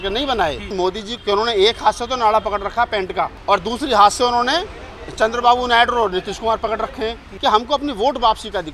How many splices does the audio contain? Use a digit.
3